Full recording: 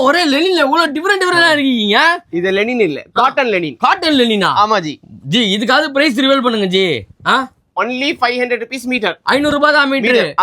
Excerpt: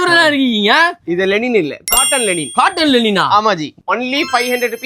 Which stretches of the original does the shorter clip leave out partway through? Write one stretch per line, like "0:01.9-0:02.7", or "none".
0:05.0-0:07.6